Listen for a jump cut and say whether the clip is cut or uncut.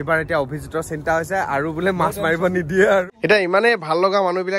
cut